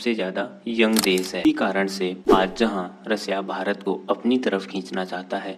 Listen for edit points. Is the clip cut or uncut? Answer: cut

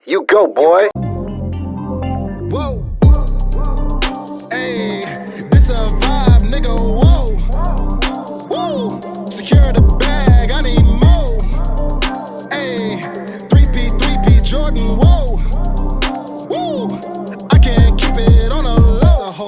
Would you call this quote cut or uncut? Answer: cut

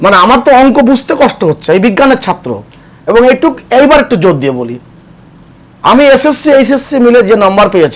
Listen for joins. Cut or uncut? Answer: uncut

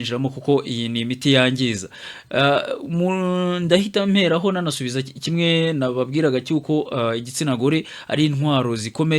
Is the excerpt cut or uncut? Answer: uncut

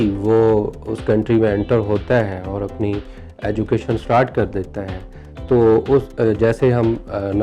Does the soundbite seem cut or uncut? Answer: uncut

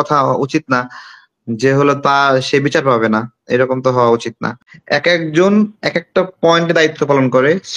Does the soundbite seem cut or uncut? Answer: cut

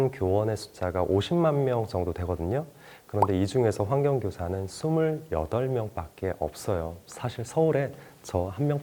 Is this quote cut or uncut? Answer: uncut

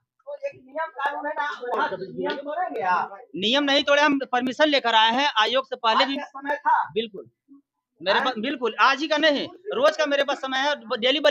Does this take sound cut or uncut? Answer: uncut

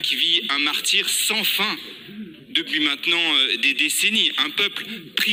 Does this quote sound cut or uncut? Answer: uncut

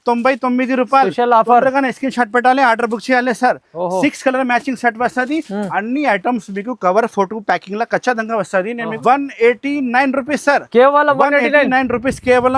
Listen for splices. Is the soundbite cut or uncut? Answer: cut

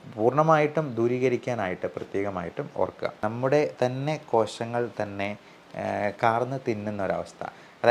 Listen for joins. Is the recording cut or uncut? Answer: cut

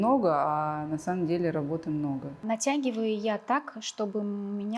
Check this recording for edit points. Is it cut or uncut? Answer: cut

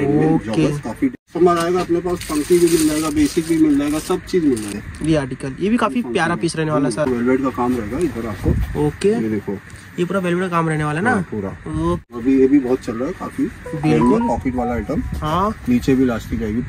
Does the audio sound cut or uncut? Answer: cut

